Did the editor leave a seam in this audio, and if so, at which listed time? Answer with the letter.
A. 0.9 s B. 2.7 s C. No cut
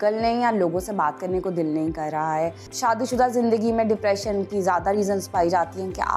B